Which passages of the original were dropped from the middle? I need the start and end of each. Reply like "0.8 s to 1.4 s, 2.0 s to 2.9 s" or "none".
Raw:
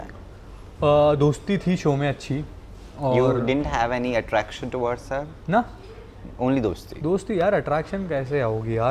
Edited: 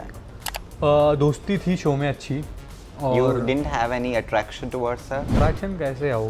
5.3 s to 7.6 s